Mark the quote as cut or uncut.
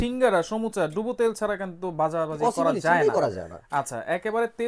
uncut